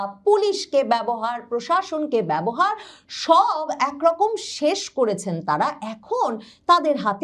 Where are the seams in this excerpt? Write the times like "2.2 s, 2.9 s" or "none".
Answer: none